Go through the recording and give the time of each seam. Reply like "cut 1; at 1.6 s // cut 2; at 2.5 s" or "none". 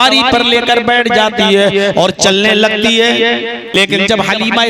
cut 1; at 3.8 s